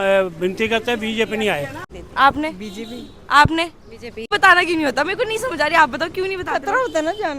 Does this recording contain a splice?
yes; 2 cuts; at 1.8 s, 4.3 s

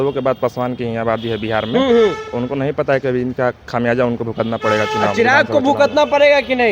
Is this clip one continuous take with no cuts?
yes; 0 cuts

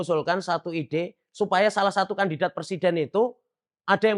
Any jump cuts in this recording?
no; 0 cuts

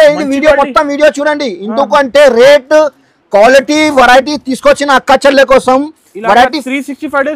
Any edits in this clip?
no; 0 cuts

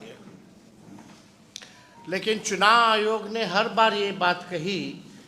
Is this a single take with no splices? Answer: yes; 0 cuts

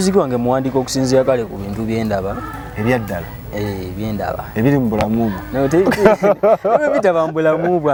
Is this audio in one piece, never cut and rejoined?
yes; 0 cuts

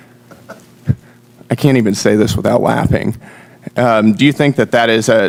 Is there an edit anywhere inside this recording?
no; 0 cuts

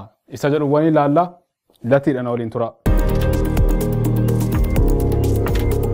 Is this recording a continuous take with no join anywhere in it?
no; 1 cut; at 2.8 s

